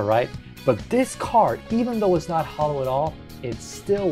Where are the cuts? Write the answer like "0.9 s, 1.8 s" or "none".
none